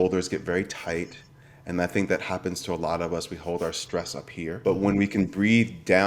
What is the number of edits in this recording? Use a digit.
1